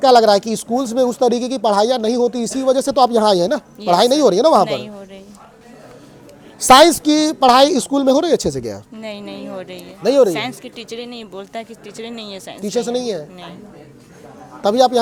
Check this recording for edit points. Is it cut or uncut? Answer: uncut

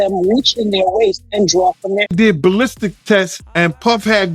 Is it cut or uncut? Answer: cut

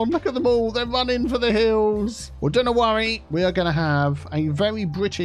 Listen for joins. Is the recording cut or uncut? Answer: cut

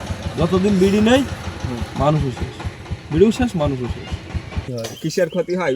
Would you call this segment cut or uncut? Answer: cut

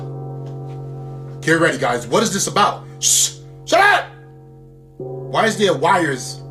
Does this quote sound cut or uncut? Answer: uncut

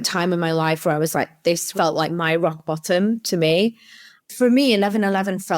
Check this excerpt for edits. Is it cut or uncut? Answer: cut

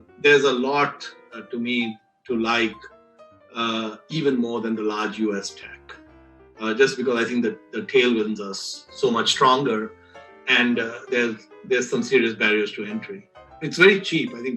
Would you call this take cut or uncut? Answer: cut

